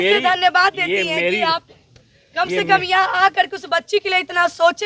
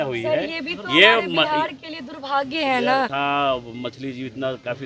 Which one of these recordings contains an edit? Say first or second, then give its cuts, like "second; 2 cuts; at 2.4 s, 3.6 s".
second; 1 cut; at 3.1 s